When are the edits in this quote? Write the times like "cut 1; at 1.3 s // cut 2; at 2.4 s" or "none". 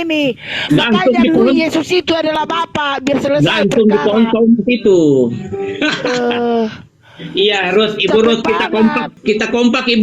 cut 1; at 9.1 s